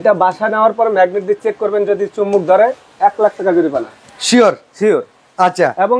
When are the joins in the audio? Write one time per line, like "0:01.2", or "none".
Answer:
none